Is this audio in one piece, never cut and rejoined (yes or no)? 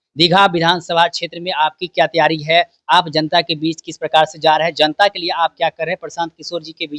yes